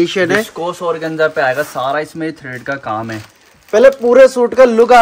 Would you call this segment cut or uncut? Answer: uncut